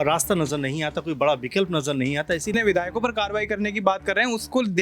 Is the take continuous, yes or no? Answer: no